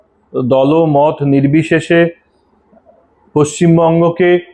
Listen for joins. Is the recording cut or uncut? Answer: uncut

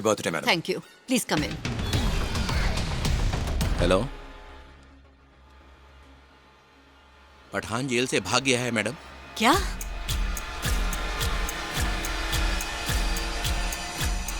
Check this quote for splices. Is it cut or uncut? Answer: cut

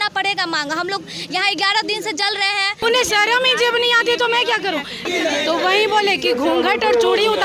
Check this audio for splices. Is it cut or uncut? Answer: cut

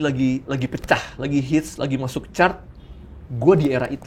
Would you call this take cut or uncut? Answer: uncut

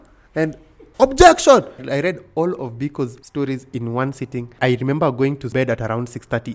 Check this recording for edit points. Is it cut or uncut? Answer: cut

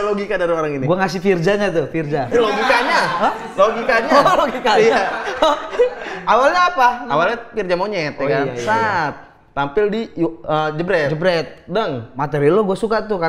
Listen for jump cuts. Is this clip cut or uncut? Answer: uncut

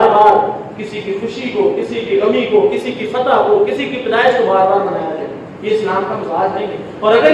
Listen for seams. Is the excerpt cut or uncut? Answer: uncut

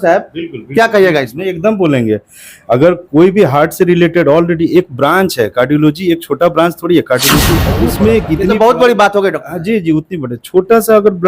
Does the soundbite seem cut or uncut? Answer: cut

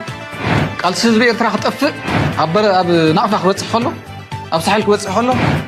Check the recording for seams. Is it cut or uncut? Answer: uncut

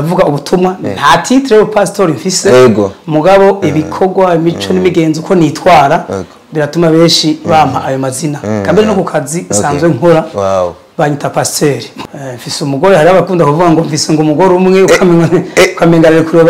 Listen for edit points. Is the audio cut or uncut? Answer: cut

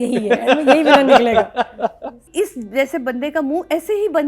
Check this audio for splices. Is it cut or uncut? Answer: cut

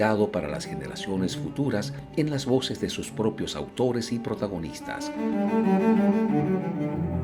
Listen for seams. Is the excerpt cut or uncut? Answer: uncut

